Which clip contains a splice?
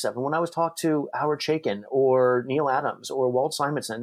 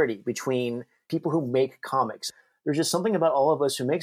second; 2 cuts; at 1.1 s, 2.3 s

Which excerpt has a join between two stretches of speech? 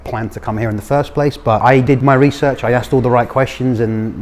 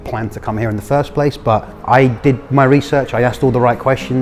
first; 1 cut; at 1.9 s

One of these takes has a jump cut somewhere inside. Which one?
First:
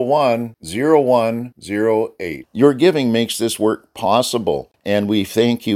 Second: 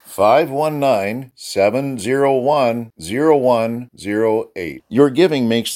first; 1 cut; at 4.7 s

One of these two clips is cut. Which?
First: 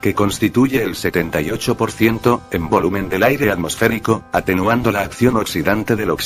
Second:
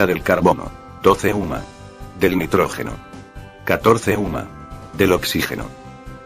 second; 1 cut; at 2.7 s

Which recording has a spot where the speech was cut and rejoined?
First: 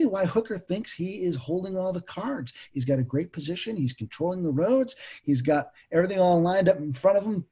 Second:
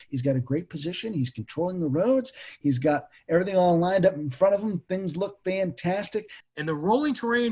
second; 1 cut; at 6.4 s

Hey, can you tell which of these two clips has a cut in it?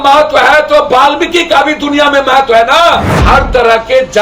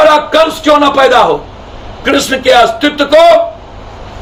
first; 1 cut; at 3.2 s

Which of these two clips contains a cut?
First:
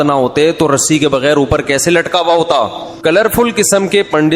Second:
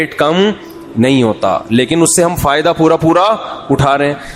first; 1 cut; at 2.8 s

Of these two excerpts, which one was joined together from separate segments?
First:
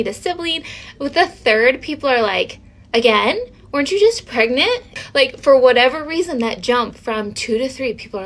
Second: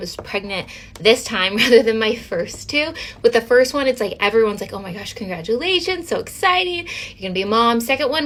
first; 1 cut; at 4.9 s

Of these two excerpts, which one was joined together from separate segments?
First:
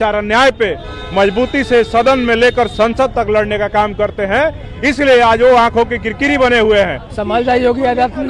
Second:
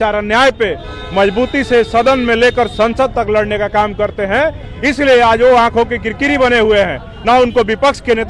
first; 1 cut; at 7.1 s

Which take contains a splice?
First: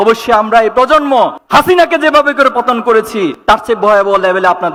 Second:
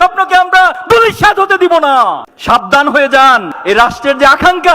second; 2 cuts; at 2.3 s, 3.5 s

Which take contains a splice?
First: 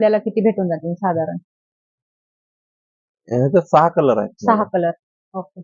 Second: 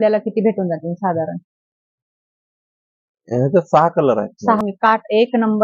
second; 1 cut; at 4.6 s

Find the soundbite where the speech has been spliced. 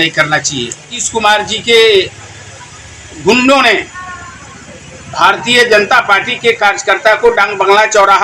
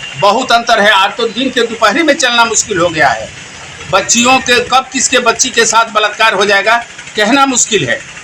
first; 1 cut; at 1.0 s

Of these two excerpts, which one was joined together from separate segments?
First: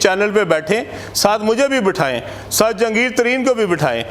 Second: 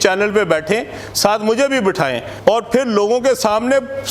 second; 1 cut; at 2.3 s

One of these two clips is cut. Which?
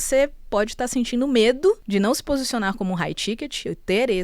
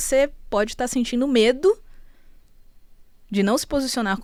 first; 1 cut; at 1.8 s

